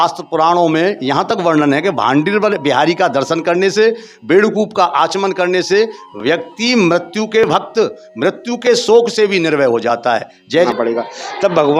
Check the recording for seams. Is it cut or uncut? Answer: cut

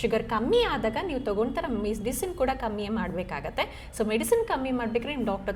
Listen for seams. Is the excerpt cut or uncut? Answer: uncut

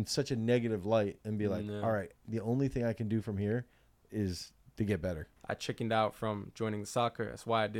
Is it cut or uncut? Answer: cut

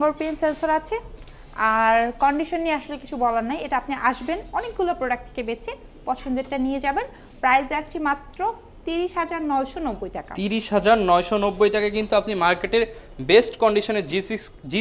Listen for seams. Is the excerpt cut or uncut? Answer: uncut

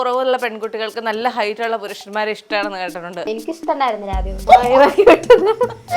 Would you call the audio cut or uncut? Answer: cut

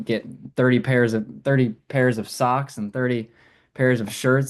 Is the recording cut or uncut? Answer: uncut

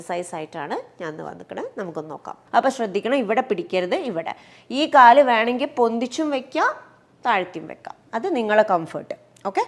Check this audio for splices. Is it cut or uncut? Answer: cut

